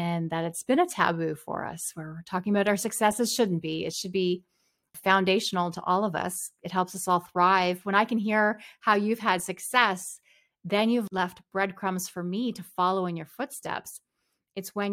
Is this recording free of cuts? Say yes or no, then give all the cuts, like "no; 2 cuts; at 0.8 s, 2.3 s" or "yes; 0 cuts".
no; 2 cuts; at 4.9 s, 11.1 s